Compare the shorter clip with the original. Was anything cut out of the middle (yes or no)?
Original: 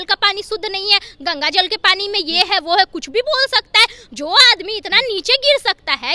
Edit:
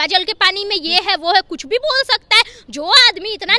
no